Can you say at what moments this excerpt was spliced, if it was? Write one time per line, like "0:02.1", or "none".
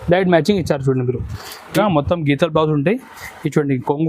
0:01.7